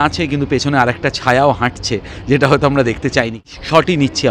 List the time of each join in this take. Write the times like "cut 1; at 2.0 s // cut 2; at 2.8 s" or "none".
cut 1; at 3.4 s